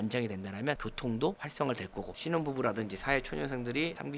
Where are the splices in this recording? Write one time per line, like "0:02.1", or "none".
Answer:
0:02.1